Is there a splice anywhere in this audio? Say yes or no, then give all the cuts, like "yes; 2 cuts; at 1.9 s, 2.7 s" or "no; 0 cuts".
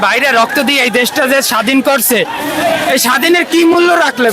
no; 0 cuts